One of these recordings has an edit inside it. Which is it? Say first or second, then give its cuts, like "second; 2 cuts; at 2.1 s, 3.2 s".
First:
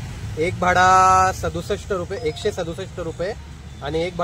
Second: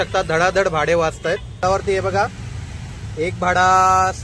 second; 1 cut; at 1.6 s